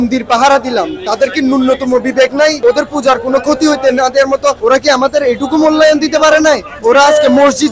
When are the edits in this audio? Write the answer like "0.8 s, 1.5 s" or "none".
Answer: 2.6 s, 4.6 s